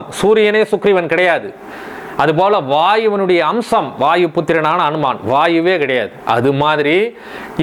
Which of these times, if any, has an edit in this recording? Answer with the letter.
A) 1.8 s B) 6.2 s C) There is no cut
C